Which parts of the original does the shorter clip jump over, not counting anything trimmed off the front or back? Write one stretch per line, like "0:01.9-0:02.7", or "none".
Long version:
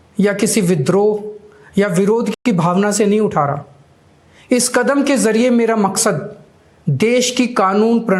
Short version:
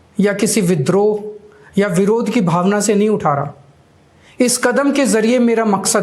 0:02.3-0:02.4